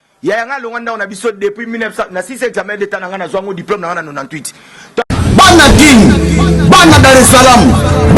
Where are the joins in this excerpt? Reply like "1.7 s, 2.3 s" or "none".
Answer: 5.0 s